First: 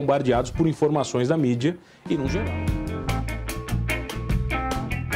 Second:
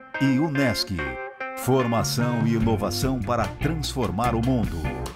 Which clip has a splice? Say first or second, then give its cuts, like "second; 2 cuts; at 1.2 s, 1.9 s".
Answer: first; 1 cut; at 2.4 s